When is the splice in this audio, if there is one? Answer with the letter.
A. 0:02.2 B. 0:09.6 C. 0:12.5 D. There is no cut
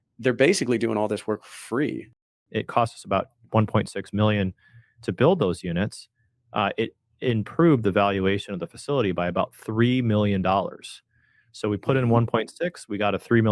A